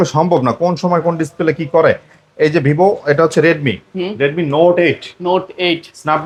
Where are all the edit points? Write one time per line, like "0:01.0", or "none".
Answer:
none